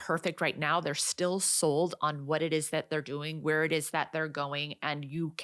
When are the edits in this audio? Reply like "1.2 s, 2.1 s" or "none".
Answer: none